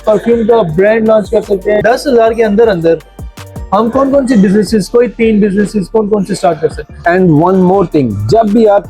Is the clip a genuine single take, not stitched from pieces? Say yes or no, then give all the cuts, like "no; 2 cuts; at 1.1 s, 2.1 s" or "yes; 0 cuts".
no; 2 cuts; at 1.8 s, 6.9 s